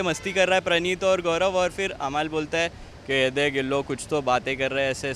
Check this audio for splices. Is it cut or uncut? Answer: uncut